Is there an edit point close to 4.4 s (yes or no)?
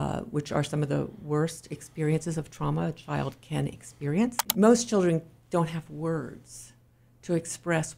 yes